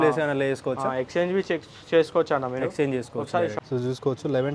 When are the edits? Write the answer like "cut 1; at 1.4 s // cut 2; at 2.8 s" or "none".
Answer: cut 1; at 3.5 s